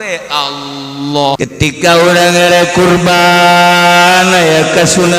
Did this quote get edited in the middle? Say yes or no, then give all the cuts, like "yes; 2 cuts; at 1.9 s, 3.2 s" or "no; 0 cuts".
yes; 1 cut; at 1.4 s